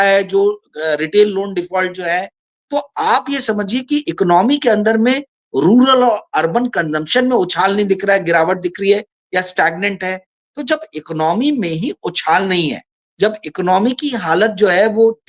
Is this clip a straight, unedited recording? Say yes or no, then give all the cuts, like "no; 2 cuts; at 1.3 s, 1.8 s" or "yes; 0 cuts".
yes; 0 cuts